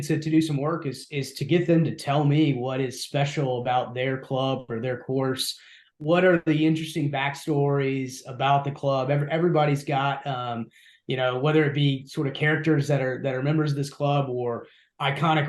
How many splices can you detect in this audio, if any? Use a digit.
1